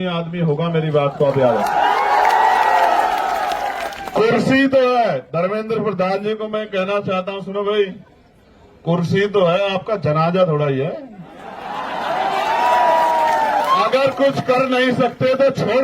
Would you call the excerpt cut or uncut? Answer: cut